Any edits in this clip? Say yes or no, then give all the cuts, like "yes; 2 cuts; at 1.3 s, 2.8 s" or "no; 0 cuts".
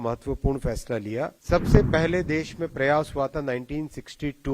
yes; 1 cut; at 1.4 s